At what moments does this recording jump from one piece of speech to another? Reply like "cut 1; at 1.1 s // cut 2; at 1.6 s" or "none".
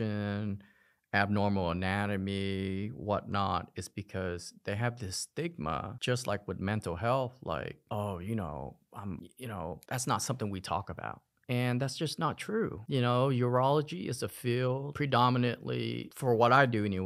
none